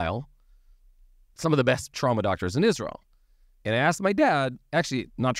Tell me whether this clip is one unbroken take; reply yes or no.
yes